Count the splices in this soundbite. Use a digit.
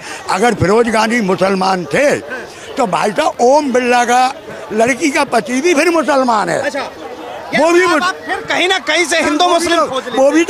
0